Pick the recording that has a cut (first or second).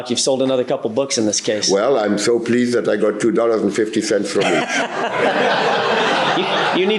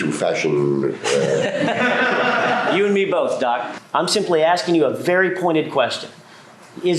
second